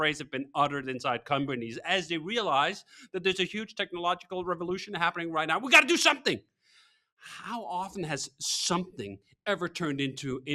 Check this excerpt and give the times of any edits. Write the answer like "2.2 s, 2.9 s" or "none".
none